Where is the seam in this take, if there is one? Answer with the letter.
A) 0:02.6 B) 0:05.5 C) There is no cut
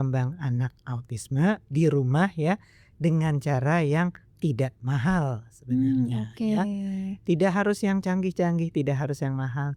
C